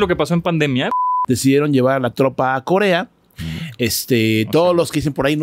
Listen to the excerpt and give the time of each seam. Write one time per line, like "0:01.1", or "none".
0:00.9